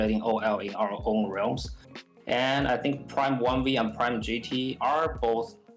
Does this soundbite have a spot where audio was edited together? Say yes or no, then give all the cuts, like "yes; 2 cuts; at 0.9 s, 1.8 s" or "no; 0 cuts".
no; 0 cuts